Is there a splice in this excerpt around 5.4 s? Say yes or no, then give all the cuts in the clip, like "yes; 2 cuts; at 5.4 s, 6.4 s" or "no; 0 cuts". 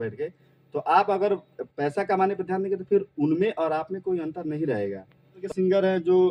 yes; 1 cut; at 5.4 s